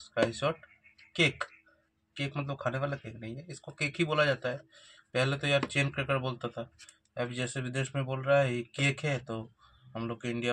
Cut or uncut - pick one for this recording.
uncut